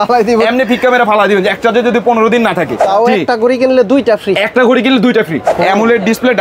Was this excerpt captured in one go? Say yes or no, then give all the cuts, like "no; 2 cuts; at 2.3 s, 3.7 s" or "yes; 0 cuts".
no; 2 cuts; at 2.8 s, 5.5 s